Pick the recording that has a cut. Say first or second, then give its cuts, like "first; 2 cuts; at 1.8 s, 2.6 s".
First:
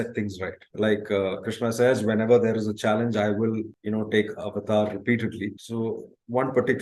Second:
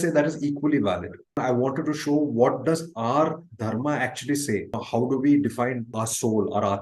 second; 3 cuts; at 1.4 s, 4.8 s, 5.9 s